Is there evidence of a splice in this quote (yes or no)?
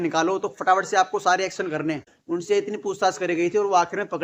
yes